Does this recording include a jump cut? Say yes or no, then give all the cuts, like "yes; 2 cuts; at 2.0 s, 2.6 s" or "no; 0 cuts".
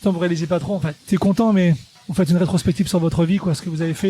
yes; 2 cuts; at 1.1 s, 1.9 s